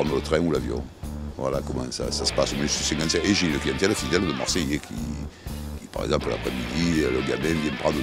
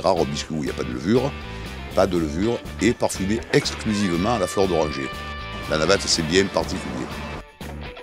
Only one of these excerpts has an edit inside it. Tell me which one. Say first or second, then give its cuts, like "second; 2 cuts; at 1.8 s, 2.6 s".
first; 1 cut; at 2.2 s